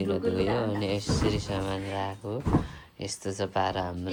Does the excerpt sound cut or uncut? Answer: uncut